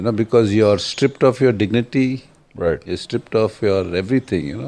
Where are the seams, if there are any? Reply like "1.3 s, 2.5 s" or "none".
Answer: none